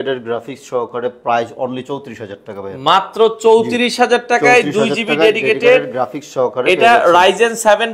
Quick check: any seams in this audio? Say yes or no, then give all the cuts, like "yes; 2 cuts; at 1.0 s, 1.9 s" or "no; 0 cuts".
no; 0 cuts